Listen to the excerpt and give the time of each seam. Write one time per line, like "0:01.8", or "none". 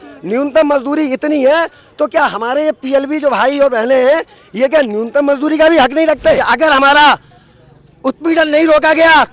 0:06.4